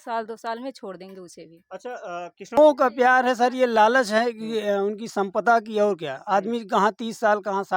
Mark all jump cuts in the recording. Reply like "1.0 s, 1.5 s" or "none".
2.6 s